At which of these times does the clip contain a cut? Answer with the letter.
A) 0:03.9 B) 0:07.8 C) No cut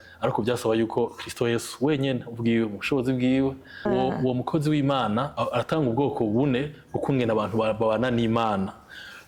A